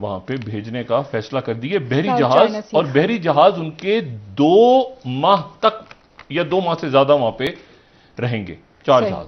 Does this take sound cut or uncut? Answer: uncut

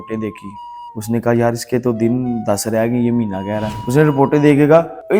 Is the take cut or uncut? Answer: cut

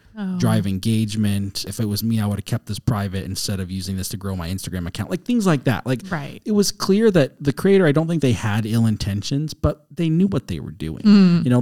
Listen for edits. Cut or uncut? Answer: cut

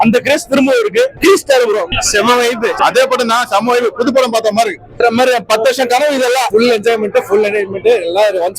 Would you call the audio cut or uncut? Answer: cut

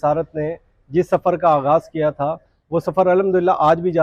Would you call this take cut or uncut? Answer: uncut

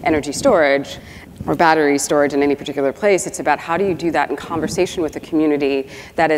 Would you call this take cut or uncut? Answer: cut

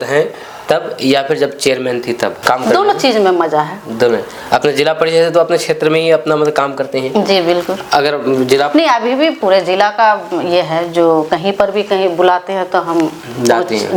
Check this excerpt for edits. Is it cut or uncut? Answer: uncut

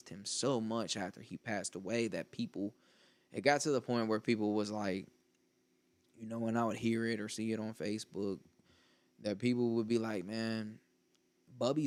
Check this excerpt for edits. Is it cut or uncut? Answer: uncut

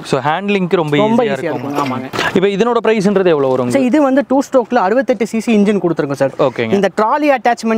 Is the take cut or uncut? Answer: uncut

